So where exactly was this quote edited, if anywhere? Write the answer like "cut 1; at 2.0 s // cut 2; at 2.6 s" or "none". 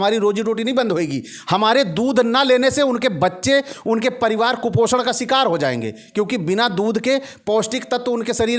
none